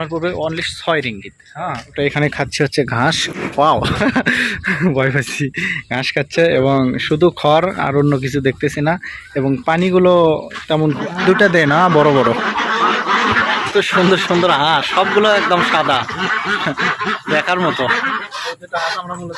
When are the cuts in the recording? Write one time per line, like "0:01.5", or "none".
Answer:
0:01.9
0:11.0
0:13.4
0:18.3

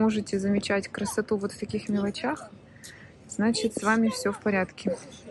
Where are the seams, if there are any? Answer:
none

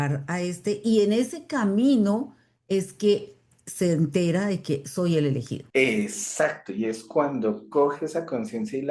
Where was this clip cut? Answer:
0:05.6

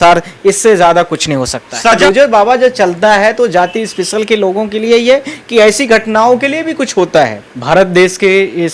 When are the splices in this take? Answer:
0:02.0
0:07.5

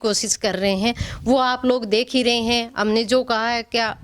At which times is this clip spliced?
none

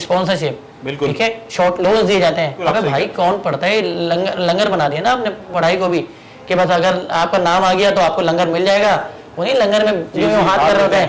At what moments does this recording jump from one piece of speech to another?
none

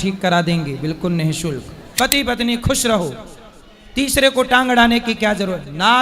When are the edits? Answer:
0:01.8

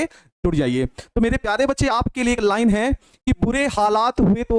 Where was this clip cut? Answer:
0:03.4

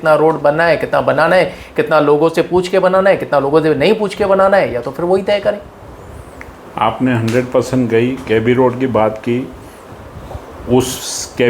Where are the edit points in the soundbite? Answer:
none

